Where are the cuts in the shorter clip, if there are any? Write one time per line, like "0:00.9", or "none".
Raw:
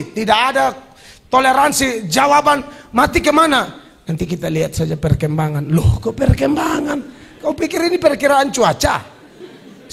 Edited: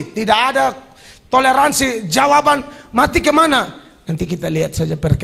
none

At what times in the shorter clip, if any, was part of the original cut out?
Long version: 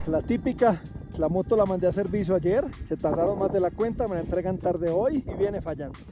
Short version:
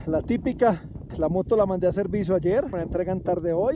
0:02.8

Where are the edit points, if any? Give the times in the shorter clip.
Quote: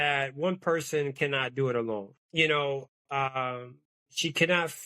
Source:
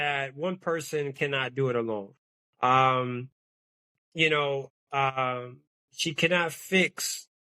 0:02.2

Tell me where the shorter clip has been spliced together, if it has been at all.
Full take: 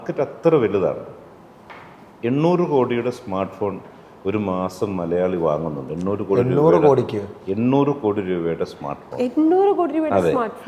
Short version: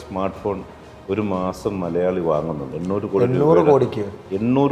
none

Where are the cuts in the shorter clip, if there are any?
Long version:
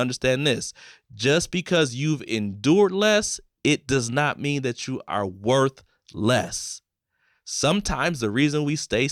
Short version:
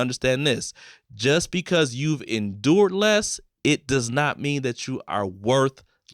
none

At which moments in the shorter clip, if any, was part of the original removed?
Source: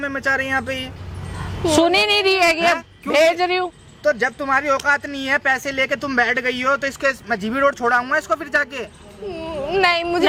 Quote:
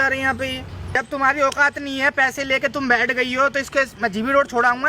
0:01.0

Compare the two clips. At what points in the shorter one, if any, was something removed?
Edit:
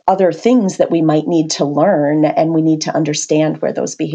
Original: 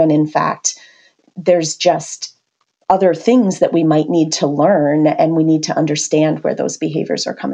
none

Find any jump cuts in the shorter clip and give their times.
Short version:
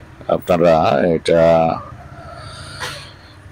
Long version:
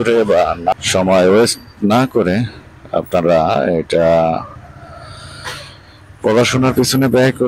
none

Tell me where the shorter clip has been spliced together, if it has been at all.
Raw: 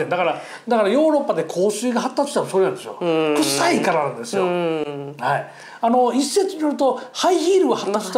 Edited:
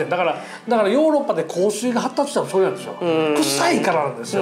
none

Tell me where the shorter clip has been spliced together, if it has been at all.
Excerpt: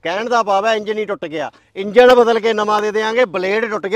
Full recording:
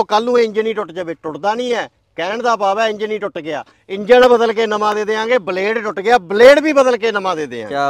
none

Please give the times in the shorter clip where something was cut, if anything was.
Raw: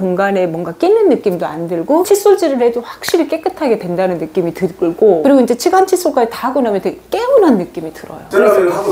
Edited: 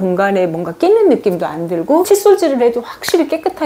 none

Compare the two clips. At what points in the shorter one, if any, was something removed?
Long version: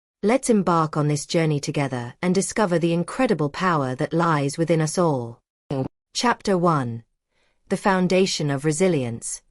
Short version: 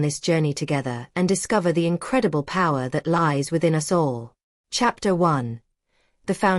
0:04.5

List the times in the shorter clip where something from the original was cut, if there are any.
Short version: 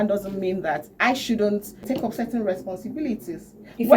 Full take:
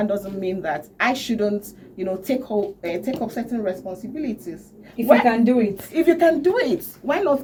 0:02.0

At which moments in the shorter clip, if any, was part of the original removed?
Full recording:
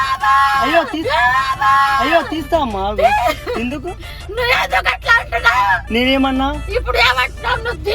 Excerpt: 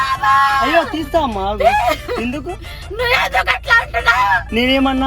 0:00.9

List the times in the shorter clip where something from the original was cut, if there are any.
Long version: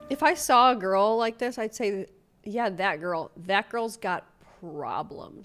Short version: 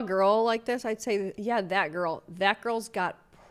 0:01.3

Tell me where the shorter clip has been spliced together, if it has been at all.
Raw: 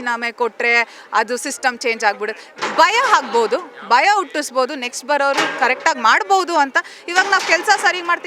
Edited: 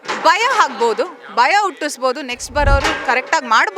none

